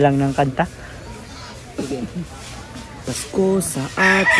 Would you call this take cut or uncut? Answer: uncut